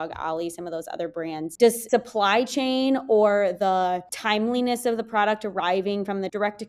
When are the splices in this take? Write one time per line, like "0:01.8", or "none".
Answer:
0:01.5